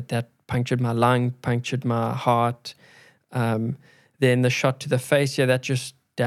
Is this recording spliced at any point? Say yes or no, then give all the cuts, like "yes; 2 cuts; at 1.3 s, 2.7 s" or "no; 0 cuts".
no; 0 cuts